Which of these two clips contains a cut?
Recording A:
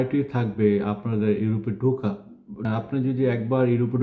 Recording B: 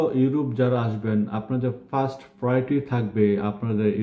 A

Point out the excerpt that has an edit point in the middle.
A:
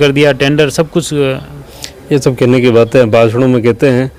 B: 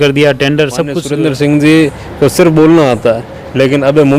B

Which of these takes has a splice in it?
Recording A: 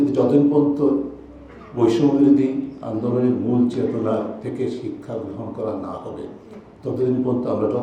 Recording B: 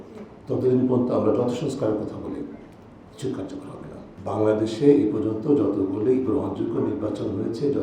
B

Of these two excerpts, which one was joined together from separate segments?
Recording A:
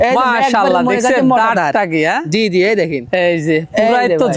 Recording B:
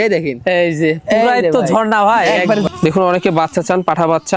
B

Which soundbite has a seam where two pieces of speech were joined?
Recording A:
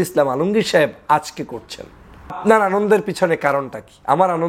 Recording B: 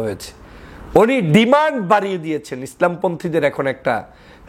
A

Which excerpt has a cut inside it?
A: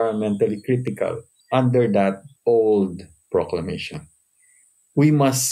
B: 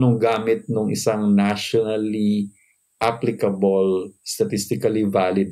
A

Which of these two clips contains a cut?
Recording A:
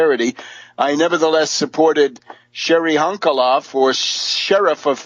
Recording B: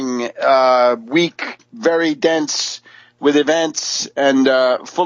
A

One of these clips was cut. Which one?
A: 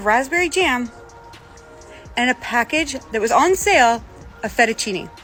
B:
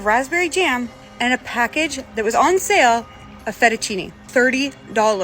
B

